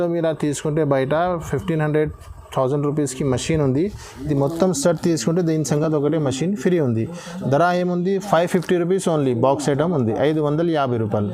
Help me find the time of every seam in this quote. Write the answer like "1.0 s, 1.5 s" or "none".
none